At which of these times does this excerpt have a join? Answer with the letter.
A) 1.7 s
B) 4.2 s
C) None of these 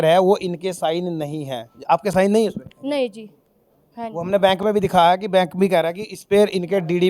C